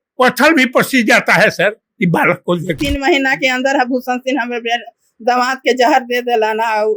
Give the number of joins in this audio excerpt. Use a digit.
1